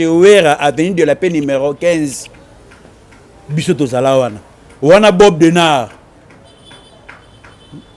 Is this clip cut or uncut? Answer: uncut